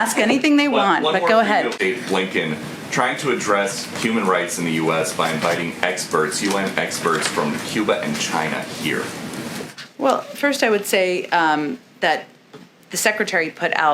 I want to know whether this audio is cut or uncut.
cut